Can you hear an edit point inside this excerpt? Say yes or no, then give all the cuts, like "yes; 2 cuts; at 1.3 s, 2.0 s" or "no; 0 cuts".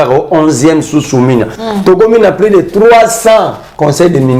yes; 1 cut; at 1.6 s